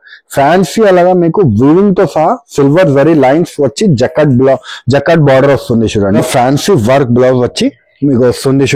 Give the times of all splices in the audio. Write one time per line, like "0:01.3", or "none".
0:06.2